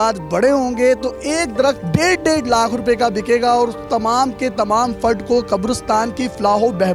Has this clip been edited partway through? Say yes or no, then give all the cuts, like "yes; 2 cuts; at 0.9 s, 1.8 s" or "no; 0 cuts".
no; 0 cuts